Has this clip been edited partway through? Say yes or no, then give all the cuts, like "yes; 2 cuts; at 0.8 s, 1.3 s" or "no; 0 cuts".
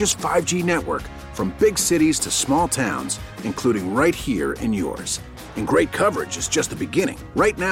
no; 0 cuts